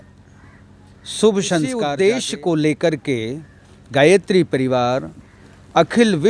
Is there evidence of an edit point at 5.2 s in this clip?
no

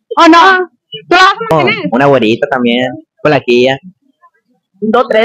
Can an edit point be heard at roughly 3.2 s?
no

